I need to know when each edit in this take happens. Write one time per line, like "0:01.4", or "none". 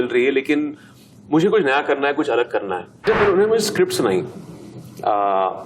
0:03.1

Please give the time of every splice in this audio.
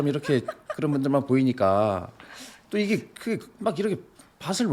none

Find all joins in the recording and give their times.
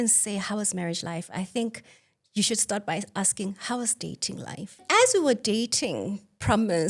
0:04.8

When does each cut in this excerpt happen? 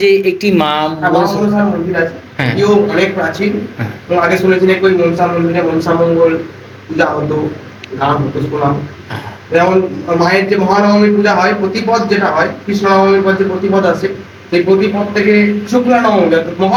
none

